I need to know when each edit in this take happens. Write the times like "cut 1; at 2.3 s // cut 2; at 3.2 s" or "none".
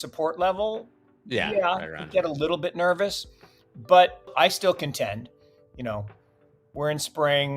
cut 1; at 4.3 s